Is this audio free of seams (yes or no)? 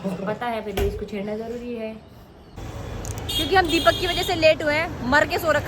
no